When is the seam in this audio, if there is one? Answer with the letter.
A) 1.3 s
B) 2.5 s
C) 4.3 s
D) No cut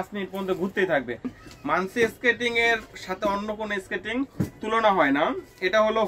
A